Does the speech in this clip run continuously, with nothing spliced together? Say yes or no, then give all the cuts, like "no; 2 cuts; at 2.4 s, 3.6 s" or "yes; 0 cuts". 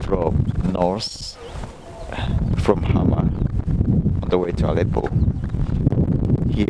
yes; 0 cuts